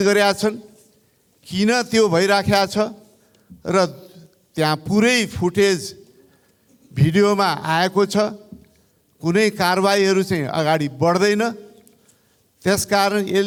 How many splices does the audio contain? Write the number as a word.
zero